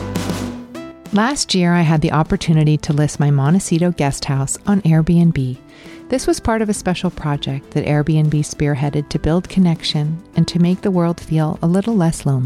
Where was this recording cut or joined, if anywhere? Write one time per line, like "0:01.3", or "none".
0:01.0